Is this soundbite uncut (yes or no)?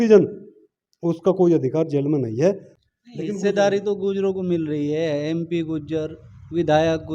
no